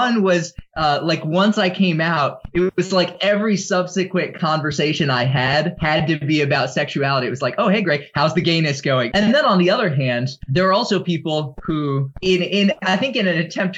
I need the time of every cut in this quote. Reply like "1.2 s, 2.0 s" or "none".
5.8 s, 9.1 s, 10.4 s, 12.1 s

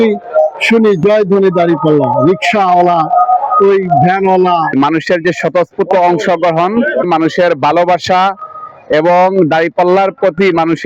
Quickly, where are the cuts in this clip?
4.7 s

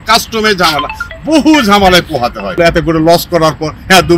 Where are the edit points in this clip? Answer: 2.6 s

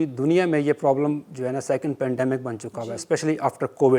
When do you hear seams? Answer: none

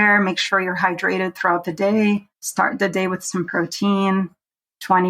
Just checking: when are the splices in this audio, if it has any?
2.4 s

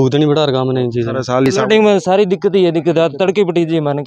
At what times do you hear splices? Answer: 1.5 s

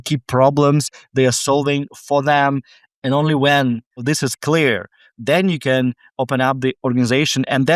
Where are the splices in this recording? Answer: 4.0 s

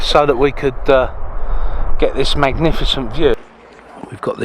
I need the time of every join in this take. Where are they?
3.3 s

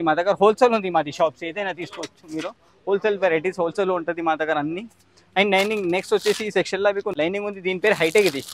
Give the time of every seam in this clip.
none

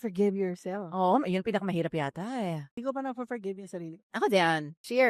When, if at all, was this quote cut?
2.7 s

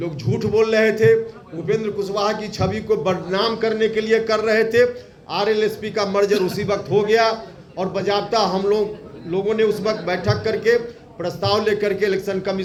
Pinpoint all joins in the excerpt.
none

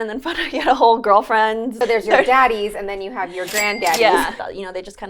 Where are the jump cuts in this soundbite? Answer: 1.7 s, 4.4 s

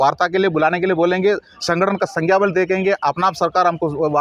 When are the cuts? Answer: none

